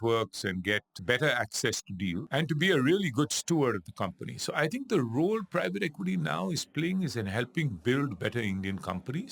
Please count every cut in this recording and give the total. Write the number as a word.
two